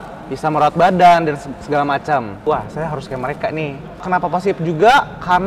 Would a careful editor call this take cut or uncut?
cut